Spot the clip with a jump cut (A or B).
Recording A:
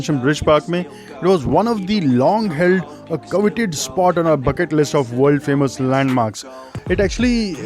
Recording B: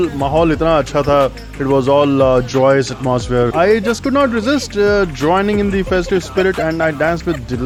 A